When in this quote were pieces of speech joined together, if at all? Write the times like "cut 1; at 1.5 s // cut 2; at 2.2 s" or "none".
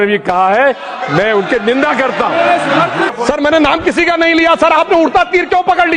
cut 1; at 3.1 s

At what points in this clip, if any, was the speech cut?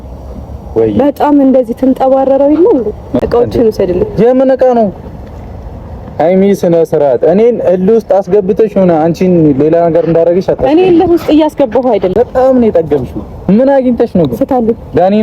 cut 1; at 3.2 s // cut 2; at 12.1 s

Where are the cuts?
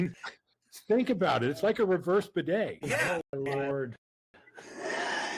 cut 1; at 2.8 s

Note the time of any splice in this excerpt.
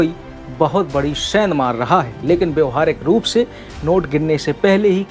cut 1; at 2.1 s

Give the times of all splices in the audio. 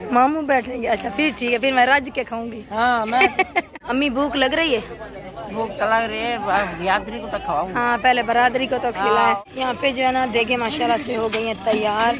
cut 1; at 3.8 s // cut 2; at 9.4 s

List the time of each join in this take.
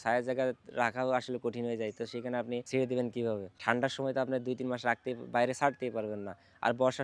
cut 1; at 2.7 s // cut 2; at 3.5 s

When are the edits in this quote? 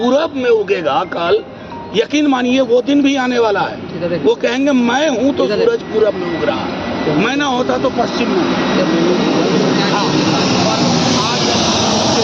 none

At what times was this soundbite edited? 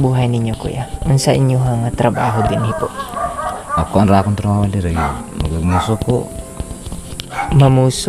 none

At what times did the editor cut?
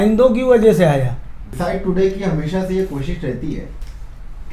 cut 1; at 1.4 s

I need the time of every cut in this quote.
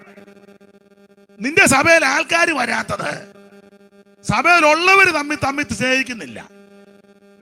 none

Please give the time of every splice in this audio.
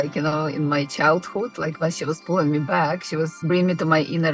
cut 1; at 3.4 s

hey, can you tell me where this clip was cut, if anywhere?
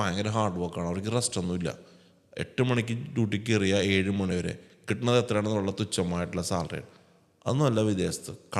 none

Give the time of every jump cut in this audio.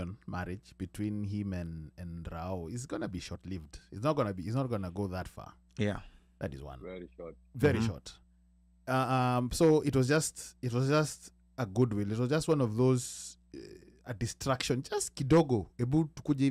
none

